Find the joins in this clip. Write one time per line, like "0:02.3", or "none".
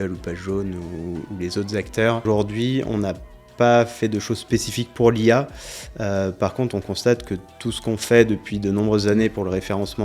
0:02.2